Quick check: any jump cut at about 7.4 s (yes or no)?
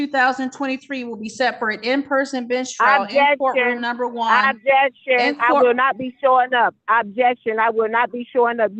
no